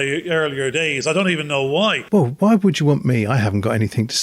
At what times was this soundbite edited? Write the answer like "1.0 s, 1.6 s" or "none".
2.0 s